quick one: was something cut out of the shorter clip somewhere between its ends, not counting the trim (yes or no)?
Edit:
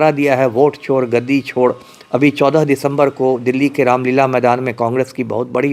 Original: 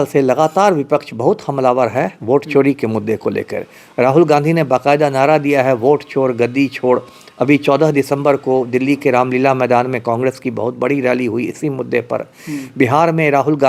no